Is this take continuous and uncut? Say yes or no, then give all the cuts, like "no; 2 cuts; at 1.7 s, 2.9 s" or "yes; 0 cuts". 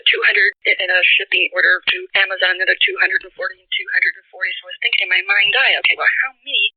yes; 0 cuts